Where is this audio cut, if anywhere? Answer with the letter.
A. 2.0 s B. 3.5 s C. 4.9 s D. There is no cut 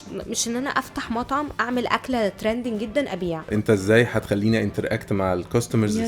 B